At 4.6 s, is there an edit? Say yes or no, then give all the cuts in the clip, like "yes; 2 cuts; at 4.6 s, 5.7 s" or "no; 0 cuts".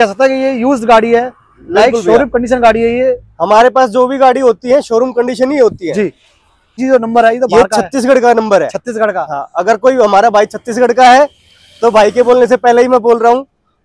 no; 1 cut; at 6.7 s